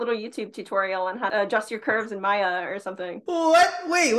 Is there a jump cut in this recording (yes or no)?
yes